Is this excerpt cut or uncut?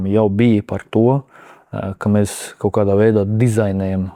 uncut